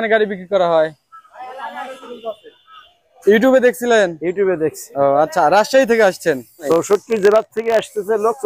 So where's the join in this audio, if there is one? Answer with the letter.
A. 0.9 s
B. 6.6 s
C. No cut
B